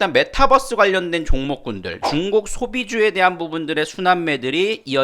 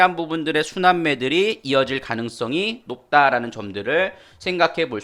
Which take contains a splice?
first; 1 cut; at 1.9 s

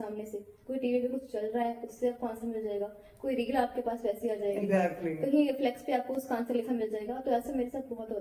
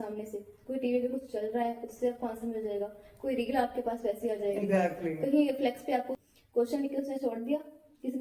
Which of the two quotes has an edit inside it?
second; 1 cut; at 6.2 s

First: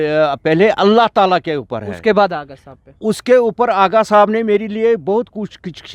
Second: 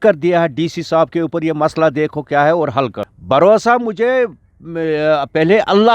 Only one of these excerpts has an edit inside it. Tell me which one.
second; 1 cut; at 3.1 s

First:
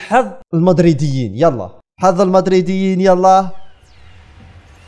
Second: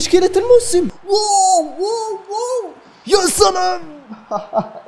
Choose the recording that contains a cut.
second; 1 cut; at 1.1 s

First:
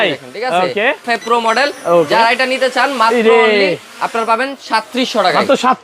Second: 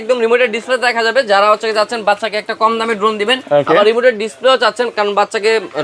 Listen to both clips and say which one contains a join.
first; 1 cut; at 1.1 s

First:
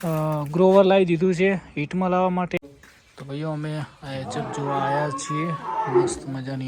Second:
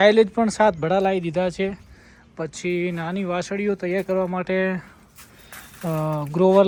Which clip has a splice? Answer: first; 1 cut; at 2.6 s

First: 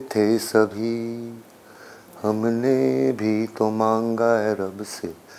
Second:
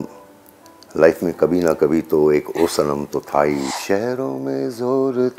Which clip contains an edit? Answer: second; 1 cut; at 3.7 s

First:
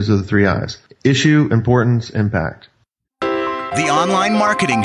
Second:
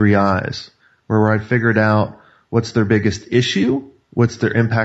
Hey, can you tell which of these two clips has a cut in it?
first; 1 cut; at 3.0 s

